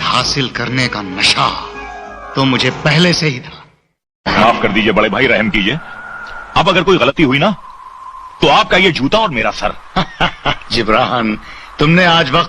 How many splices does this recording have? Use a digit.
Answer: 1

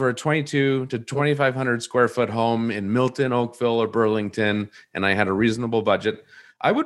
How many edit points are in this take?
1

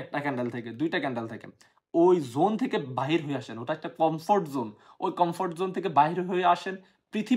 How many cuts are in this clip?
0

